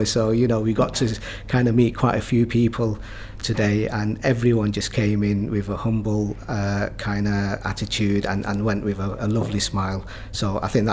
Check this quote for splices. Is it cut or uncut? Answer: uncut